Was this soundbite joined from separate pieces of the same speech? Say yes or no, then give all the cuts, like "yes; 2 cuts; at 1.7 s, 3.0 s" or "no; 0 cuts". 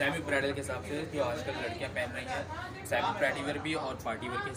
no; 0 cuts